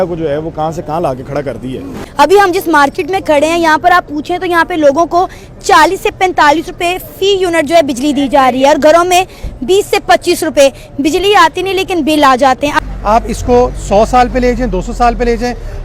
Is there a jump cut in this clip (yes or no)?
yes